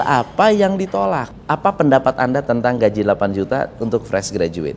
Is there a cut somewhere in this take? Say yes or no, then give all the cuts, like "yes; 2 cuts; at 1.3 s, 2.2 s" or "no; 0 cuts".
yes; 1 cut; at 1.3 s